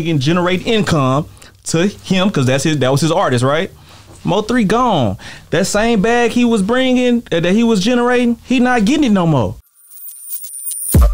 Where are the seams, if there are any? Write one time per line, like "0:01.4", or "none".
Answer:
0:09.7